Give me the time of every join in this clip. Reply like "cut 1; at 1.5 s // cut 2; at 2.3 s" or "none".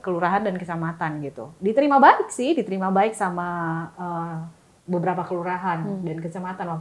cut 1; at 1.4 s